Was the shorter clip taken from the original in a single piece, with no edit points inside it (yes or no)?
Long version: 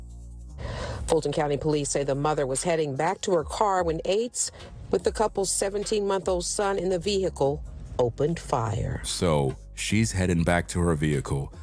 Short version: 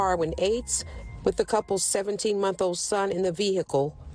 yes